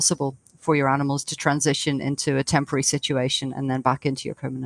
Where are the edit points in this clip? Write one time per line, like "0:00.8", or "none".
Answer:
none